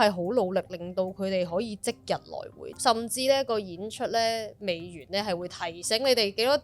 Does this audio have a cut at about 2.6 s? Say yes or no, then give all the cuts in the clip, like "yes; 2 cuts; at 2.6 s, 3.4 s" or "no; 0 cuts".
yes; 1 cut; at 2.6 s